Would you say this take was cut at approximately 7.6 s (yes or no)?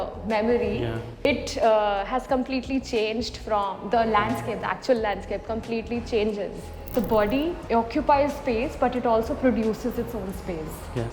yes